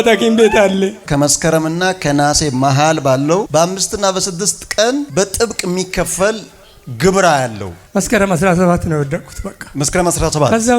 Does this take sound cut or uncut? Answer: cut